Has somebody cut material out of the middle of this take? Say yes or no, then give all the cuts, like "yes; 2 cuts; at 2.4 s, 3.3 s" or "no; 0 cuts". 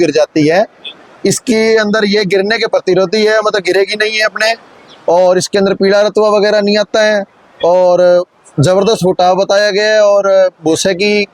no; 0 cuts